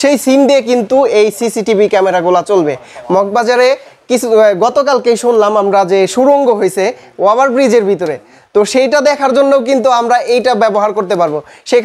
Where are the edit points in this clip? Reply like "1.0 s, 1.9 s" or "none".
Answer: none